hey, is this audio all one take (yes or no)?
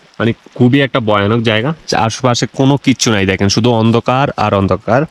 yes